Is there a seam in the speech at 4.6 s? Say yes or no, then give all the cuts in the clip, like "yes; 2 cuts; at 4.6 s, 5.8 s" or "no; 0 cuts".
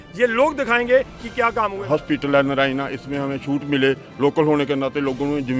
no; 1 cut; at 1.8 s